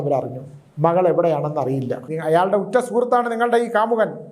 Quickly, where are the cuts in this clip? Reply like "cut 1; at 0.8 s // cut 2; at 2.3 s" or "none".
cut 1; at 2.1 s